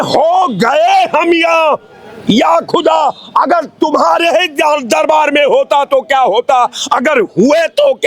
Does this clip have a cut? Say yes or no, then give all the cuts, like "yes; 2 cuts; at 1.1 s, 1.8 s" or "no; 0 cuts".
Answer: no; 0 cuts